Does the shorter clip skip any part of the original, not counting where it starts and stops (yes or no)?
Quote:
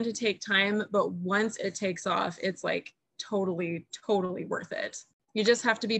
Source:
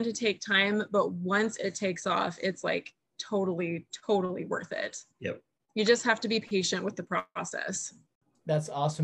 yes